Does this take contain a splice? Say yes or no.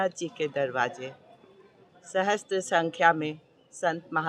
no